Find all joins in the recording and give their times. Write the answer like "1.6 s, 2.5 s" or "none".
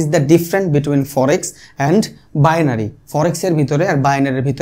none